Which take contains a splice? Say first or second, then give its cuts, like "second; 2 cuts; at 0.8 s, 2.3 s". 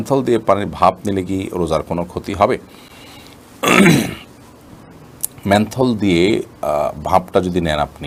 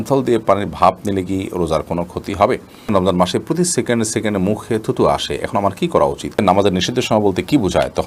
second; 2 cuts; at 2.8 s, 6.4 s